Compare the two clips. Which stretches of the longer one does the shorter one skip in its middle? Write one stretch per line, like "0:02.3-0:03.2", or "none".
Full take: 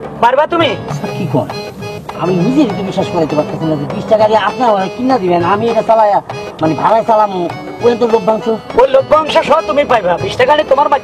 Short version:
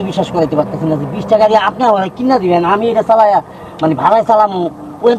none